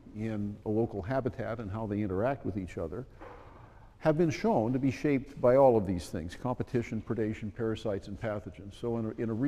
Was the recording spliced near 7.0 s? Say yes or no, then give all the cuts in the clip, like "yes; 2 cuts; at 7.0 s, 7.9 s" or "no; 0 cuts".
no; 1 cut; at 5.2 s